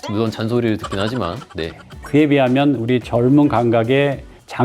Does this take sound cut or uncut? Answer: cut